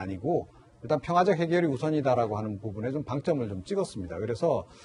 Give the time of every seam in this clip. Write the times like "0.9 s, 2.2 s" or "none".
none